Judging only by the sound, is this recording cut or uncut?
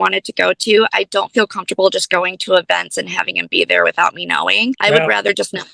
cut